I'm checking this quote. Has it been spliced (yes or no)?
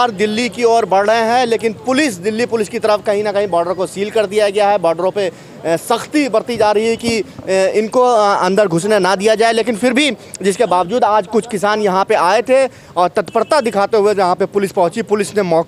no